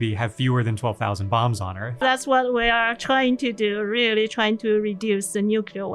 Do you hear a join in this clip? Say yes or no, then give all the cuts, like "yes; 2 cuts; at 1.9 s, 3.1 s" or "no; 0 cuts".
yes; 1 cut; at 2.0 s